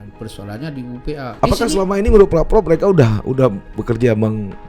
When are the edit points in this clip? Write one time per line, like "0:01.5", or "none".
0:01.3